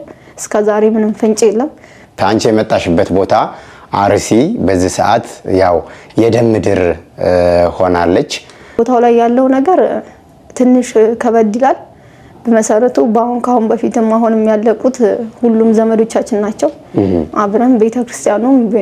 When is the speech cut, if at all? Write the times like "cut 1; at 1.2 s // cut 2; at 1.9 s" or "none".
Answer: cut 1; at 2.2 s // cut 2; at 8.8 s